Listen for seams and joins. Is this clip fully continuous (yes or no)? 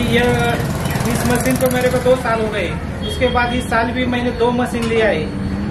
yes